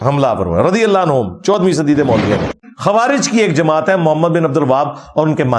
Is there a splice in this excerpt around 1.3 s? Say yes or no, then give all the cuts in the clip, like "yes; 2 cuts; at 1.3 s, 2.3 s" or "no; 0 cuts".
no; 1 cut; at 2.6 s